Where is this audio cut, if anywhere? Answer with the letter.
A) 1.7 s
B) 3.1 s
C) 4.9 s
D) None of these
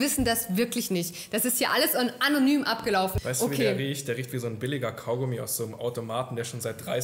B